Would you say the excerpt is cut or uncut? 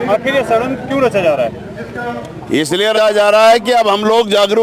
cut